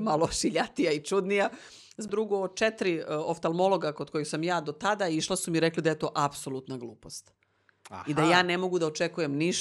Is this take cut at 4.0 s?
no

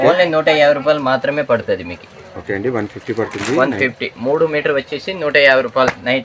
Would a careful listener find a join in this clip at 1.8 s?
no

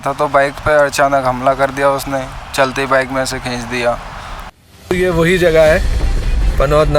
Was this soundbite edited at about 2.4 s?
no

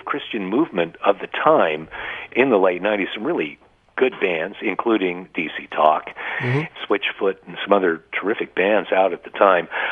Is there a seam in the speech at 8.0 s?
no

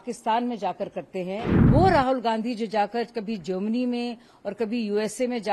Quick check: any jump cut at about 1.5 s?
yes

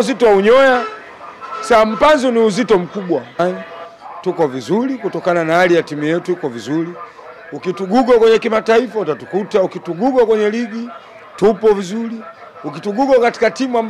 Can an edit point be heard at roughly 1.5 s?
no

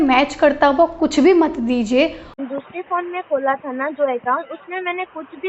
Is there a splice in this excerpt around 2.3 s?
yes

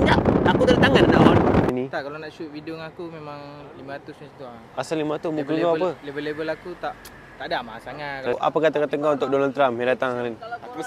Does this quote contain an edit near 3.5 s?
no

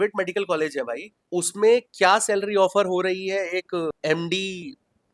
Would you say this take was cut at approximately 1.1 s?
yes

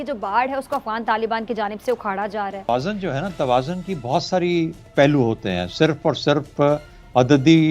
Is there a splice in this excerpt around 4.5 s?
no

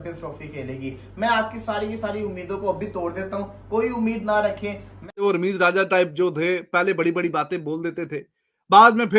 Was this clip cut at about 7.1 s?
no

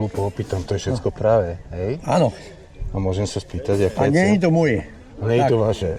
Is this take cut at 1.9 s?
no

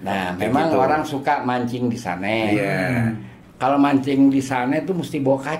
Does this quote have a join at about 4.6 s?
no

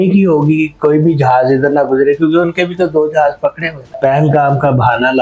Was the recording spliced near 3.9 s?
yes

